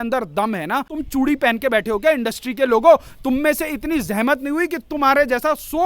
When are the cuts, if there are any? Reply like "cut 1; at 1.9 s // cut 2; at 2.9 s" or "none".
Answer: cut 1; at 0.9 s